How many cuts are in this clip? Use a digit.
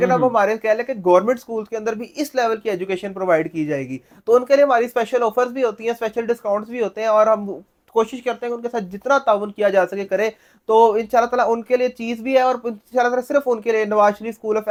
0